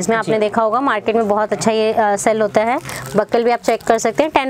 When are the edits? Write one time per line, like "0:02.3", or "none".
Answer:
none